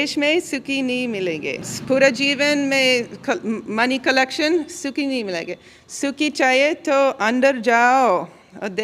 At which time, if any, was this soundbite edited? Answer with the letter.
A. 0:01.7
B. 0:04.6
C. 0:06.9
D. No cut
A